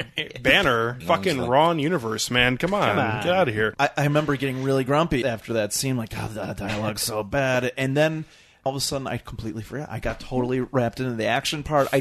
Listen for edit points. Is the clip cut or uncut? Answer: cut